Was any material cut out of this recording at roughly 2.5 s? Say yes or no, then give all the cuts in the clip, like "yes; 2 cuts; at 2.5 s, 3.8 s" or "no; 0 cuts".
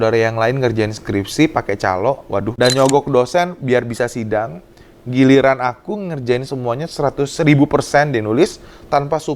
yes; 1 cut; at 2.5 s